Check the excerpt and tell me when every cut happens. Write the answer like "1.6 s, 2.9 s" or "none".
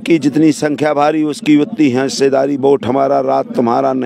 none

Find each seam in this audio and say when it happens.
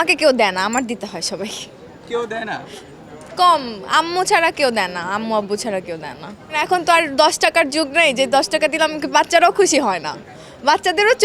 none

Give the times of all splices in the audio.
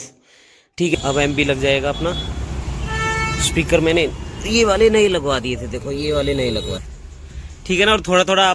0.9 s, 6.8 s

